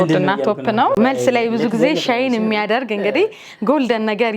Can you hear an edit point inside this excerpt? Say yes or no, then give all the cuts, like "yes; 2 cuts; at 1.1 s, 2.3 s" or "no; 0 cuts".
yes; 1 cut; at 1.0 s